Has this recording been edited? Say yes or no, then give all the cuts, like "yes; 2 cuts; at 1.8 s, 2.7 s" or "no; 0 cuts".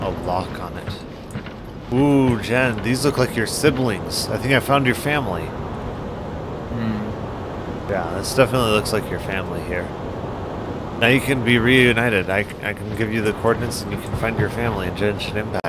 no; 0 cuts